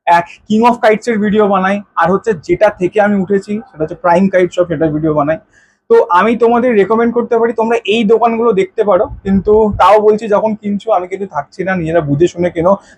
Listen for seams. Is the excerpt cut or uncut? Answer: uncut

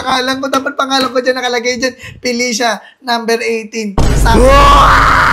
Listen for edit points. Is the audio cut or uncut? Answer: uncut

